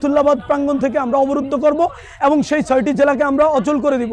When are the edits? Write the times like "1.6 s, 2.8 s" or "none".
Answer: none